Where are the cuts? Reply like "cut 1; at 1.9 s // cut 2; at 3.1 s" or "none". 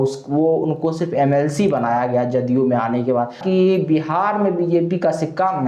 cut 1; at 3.4 s